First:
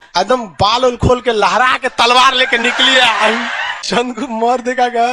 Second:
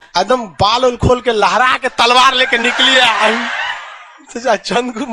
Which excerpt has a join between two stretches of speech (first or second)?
first